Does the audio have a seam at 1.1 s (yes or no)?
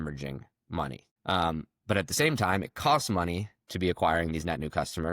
yes